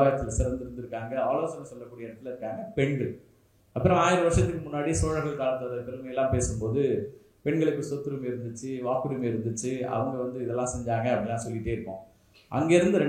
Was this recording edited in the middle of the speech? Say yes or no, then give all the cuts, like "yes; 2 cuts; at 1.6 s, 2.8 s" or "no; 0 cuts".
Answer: no; 0 cuts